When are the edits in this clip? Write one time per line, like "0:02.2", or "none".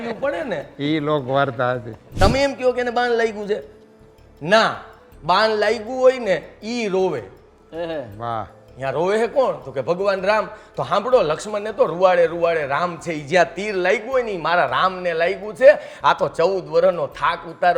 0:02.0